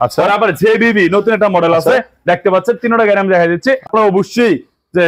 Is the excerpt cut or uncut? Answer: cut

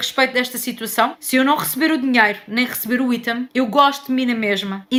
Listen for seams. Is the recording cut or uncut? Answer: uncut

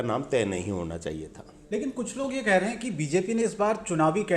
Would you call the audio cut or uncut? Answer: uncut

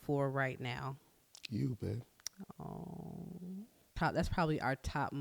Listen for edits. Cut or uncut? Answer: cut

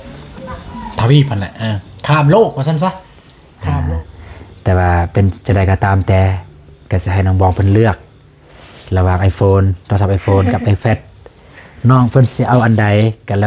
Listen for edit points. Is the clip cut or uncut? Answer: cut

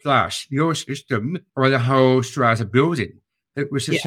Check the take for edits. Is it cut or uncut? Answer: uncut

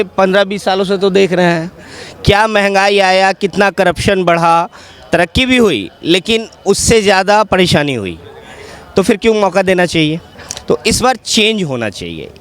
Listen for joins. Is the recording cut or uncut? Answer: uncut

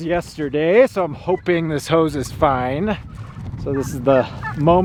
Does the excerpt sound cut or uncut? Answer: uncut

